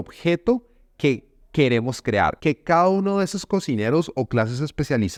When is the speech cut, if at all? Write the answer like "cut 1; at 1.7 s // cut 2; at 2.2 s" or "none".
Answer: none